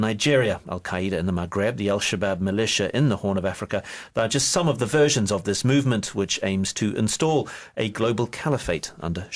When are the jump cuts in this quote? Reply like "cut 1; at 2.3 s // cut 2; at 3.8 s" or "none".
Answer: none